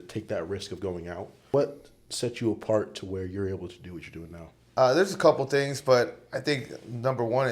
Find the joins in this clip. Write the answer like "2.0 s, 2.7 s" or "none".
1.5 s, 4.5 s